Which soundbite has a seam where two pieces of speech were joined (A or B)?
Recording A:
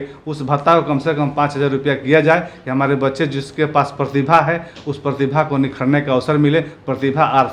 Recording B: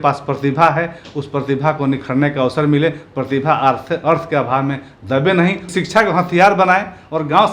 B